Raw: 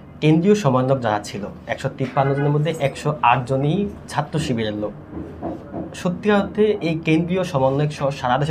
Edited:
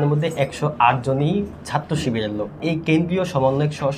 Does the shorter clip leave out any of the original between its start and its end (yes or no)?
yes